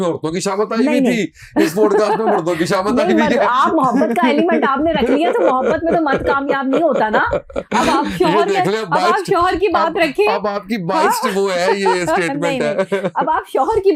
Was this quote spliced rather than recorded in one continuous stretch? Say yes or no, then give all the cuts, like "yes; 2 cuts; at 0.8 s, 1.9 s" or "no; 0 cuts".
no; 0 cuts